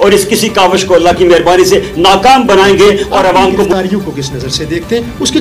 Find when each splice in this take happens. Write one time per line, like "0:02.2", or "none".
0:03.7